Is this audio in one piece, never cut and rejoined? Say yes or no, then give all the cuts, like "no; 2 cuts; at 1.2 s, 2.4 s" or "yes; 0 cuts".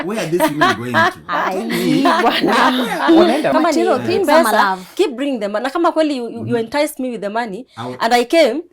no; 1 cut; at 3.5 s